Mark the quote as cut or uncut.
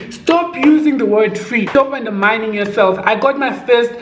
cut